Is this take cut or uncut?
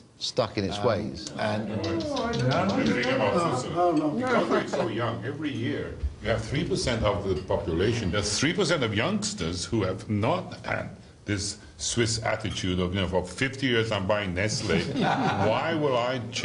cut